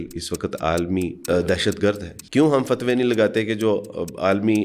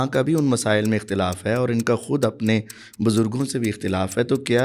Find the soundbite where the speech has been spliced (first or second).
first